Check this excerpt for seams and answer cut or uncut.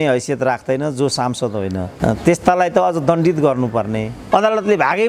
cut